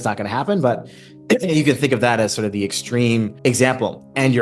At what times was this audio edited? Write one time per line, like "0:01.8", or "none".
0:03.3